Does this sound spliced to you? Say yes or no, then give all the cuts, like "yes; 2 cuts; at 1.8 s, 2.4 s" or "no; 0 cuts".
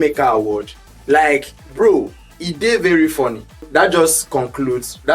yes; 1 cut; at 3.7 s